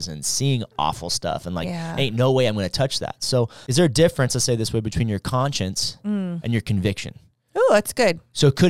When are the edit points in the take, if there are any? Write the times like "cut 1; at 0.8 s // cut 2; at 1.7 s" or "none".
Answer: cut 1; at 3.6 s